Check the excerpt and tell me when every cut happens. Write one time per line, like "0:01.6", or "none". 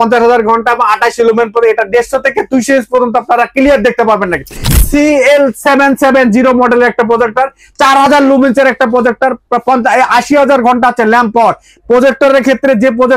0:04.7